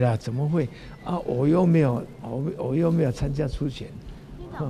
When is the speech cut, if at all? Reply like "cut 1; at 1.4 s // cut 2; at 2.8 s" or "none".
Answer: none